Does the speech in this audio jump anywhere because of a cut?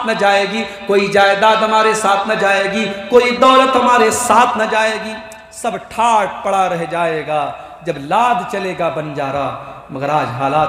no; 0 cuts

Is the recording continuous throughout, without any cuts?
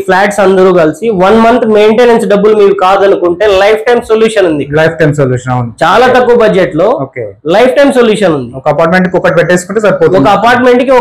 yes; 0 cuts

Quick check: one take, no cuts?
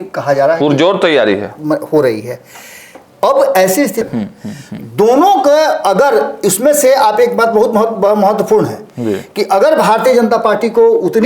no; 1 cut; at 4.0 s

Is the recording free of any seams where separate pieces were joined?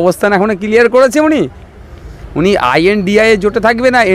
yes; 0 cuts

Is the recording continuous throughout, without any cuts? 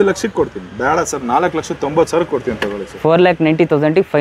yes; 0 cuts

